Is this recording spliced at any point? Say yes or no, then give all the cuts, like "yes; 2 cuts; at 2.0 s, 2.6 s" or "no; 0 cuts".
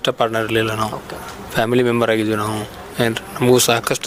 no; 0 cuts